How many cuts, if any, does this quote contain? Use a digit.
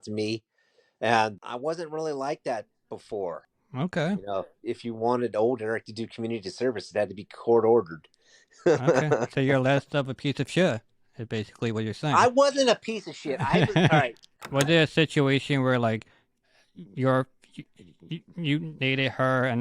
1